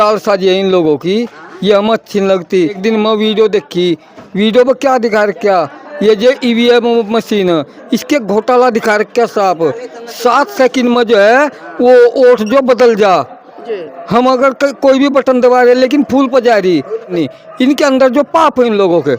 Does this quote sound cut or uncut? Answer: cut